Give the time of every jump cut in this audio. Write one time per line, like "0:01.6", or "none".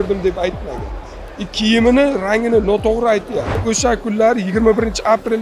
0:03.5